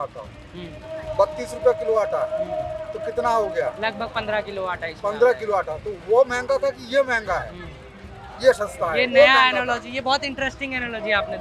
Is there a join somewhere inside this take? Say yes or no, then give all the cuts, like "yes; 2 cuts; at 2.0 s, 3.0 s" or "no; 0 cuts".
no; 0 cuts